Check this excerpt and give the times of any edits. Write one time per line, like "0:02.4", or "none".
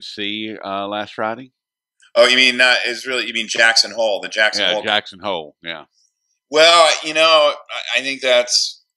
0:03.7